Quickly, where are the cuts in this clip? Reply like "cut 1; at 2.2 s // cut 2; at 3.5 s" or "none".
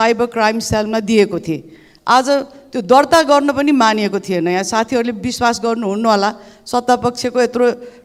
none

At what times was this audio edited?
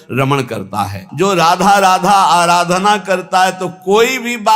cut 1; at 1.0 s

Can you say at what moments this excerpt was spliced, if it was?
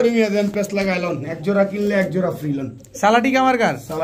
none

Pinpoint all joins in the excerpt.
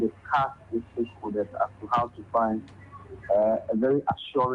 none

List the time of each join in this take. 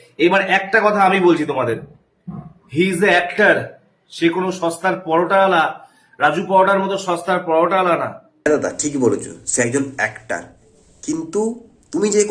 cut 1; at 8.4 s

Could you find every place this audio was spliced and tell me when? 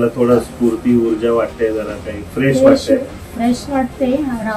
none

